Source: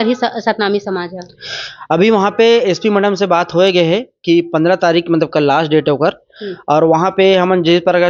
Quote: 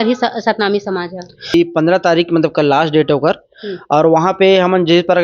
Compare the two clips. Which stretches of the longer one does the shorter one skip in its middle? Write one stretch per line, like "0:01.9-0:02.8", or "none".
0:01.5-0:04.3